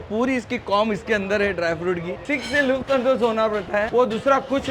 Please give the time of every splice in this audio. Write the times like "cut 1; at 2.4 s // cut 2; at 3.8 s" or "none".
cut 1; at 2.3 s